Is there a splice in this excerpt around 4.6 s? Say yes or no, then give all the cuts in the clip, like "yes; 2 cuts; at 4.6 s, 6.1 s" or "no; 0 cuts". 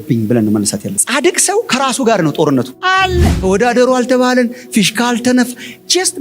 no; 1 cut; at 3.4 s